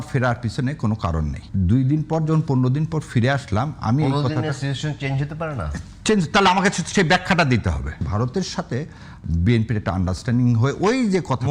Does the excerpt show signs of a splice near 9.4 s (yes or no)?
no